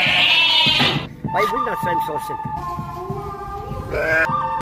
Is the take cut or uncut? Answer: cut